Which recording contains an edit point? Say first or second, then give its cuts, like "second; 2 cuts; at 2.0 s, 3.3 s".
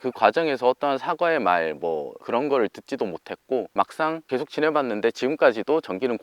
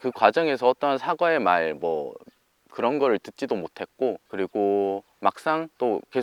first; 2 cuts; at 2.1 s, 4.1 s